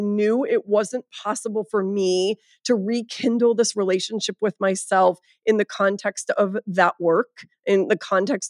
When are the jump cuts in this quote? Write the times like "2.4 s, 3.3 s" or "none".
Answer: none